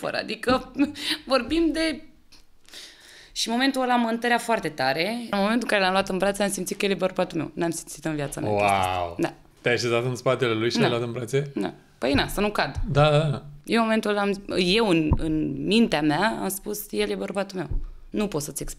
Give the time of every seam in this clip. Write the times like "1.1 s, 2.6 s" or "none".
5.3 s, 9.5 s